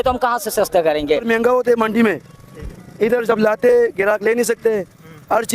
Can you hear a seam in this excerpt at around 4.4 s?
no; 1 cut; at 1.2 s

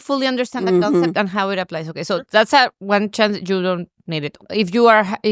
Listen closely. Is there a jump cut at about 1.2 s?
no; 1 cut; at 4.4 s

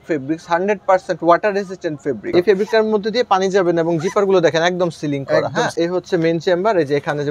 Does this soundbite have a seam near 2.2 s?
yes; 2 cuts; at 2.2 s, 5.7 s

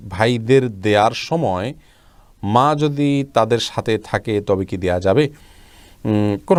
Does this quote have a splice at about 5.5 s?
no; 0 cuts

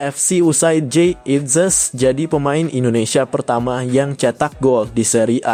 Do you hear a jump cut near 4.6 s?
no; 0 cuts

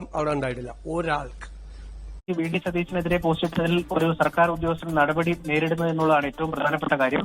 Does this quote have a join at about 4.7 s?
no; 1 cut; at 2.3 s

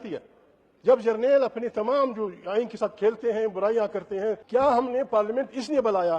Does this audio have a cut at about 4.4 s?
yes; 1 cut; at 4.4 s

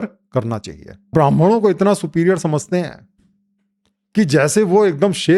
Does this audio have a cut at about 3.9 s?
no; 1 cut; at 1.1 s

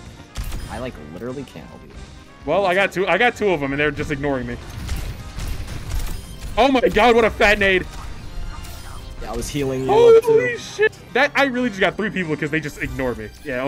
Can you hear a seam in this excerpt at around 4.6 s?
yes; 2 cuts; at 4.6 s, 10.9 s

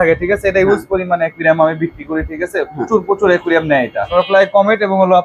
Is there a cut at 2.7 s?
no; 1 cut; at 4.1 s

